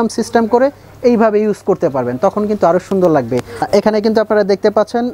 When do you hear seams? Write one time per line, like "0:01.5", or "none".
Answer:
0:03.5